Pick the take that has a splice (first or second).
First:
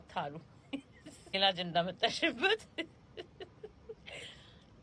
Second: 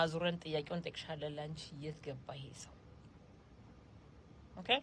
first